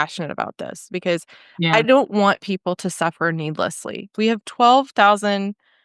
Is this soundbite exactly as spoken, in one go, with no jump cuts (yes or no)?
no